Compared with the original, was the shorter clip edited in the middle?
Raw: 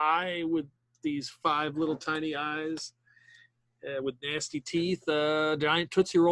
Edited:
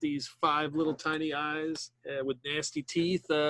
yes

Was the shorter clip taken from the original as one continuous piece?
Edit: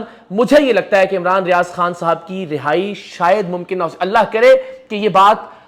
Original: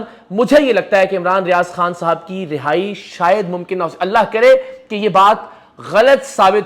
yes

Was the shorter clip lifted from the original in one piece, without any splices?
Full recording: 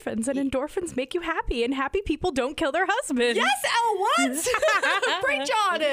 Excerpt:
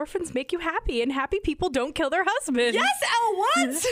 yes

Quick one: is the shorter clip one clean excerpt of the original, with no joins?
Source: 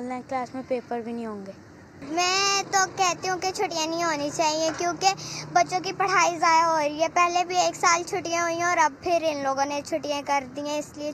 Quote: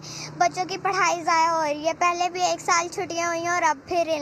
yes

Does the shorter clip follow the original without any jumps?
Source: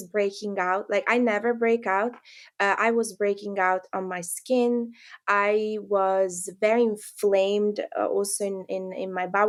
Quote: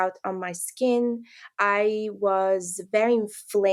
yes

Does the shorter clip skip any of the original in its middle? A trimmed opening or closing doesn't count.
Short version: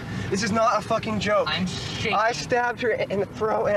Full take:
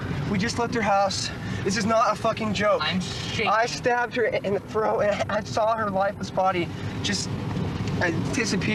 no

